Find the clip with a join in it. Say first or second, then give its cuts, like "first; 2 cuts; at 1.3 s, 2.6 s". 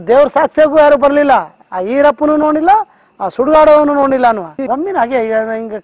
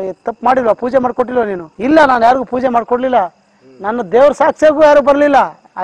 first; 1 cut; at 4.5 s